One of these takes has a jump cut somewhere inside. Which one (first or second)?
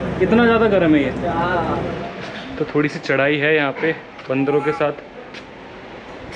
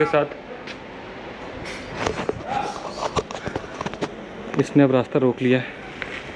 first